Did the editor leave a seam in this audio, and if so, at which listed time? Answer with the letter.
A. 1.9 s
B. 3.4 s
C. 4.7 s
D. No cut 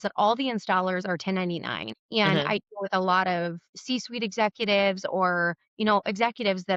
D